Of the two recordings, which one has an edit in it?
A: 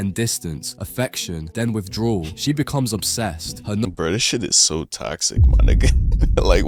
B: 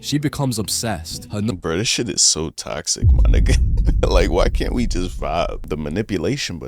B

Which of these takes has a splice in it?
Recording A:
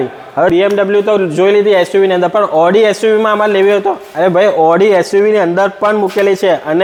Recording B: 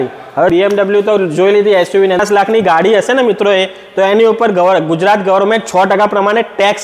B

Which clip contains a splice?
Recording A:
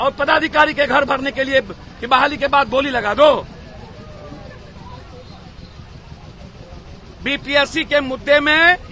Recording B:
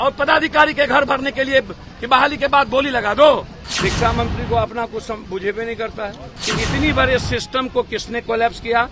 B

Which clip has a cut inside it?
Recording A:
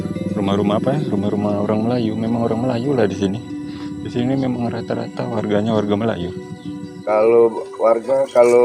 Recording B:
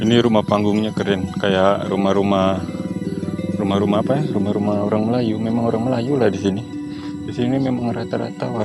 A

